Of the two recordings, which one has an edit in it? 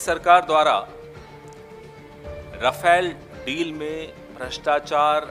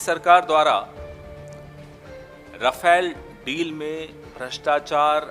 second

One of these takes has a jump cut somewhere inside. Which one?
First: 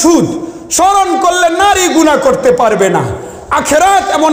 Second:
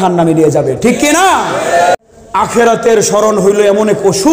second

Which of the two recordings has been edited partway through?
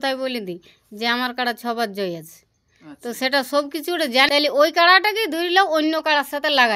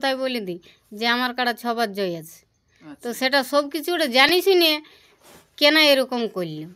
first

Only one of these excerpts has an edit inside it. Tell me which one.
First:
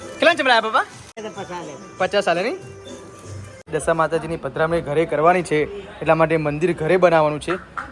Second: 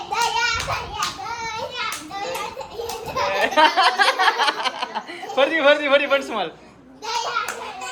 first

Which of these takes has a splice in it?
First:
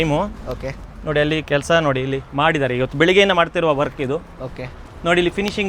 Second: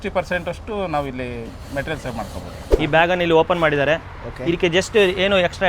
second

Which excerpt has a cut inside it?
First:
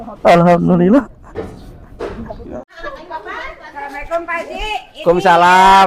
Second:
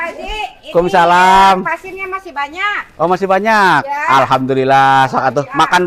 first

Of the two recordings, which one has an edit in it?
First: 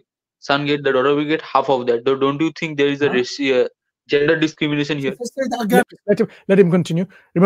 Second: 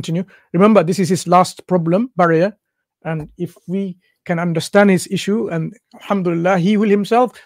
first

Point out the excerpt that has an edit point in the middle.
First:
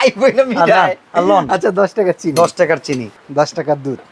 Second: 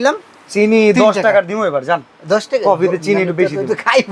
first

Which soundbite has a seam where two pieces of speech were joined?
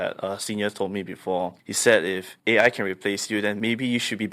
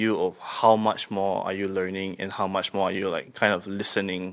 first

